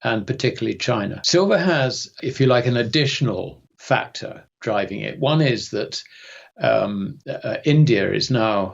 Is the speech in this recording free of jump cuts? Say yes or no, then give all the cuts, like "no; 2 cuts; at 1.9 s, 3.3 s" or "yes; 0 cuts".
no; 2 cuts; at 1.2 s, 2.1 s